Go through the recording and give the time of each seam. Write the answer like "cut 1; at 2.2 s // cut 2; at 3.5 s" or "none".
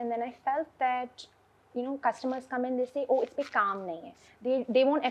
none